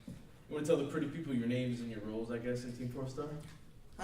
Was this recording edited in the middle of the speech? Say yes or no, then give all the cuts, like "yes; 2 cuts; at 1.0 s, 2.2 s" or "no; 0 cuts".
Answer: yes; 1 cut; at 1.3 s